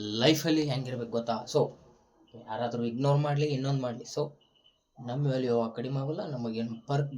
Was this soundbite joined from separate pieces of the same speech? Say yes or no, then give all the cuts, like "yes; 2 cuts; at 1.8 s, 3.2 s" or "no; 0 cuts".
no; 0 cuts